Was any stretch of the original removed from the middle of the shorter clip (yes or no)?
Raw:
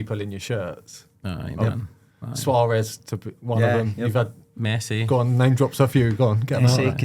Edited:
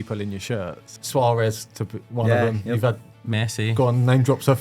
yes